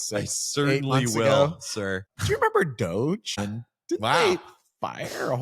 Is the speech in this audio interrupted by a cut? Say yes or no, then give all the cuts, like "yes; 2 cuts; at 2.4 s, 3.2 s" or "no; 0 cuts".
yes; 2 cuts; at 2.0 s, 3.4 s